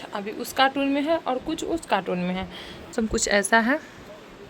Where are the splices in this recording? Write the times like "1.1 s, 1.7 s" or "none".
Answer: 2.9 s